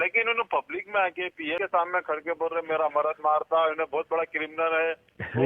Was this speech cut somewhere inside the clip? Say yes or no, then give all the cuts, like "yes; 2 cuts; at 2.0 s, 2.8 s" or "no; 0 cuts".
yes; 1 cut; at 1.6 s